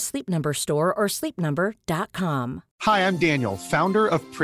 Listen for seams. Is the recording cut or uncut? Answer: cut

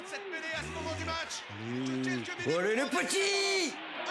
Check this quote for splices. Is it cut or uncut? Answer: uncut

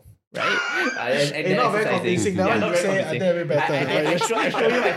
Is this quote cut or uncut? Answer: uncut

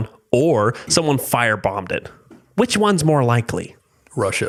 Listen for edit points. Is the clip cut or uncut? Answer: uncut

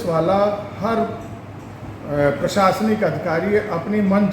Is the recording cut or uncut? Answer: uncut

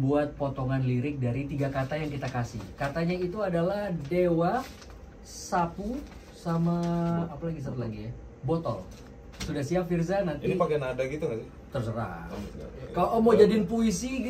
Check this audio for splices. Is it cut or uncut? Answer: uncut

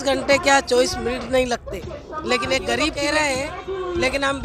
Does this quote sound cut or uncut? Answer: cut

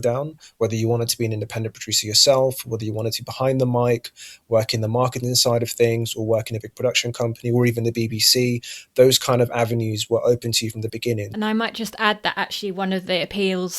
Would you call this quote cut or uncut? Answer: cut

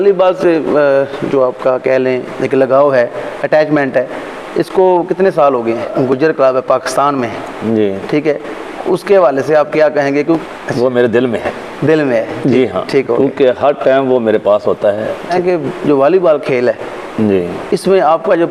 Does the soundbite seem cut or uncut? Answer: cut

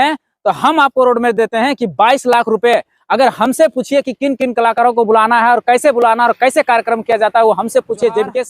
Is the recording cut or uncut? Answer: uncut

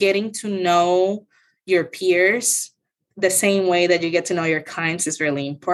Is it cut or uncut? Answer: uncut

